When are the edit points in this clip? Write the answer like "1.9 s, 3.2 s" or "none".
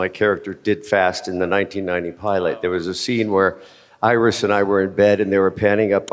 none